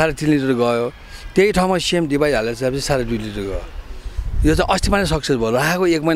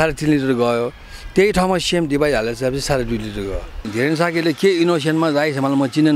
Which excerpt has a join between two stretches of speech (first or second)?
second